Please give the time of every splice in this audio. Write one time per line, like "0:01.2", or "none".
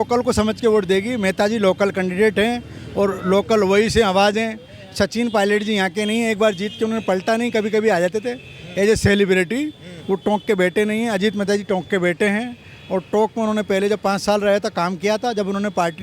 none